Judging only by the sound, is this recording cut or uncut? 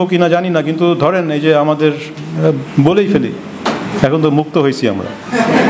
uncut